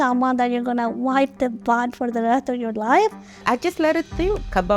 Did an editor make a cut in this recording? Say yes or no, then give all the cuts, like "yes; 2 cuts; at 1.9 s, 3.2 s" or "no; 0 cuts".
yes; 1 cut; at 3.4 s